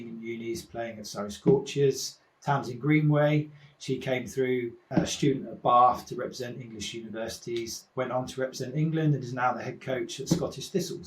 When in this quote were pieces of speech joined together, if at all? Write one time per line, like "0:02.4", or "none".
0:04.9